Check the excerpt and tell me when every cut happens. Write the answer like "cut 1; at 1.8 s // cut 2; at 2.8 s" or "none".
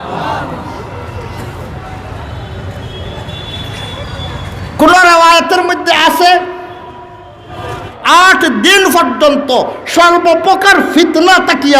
cut 1; at 7.9 s